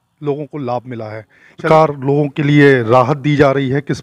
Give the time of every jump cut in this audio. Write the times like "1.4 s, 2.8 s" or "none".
1.7 s